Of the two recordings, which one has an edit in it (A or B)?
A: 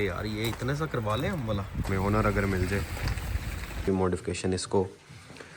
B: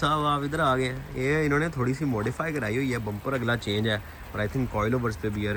A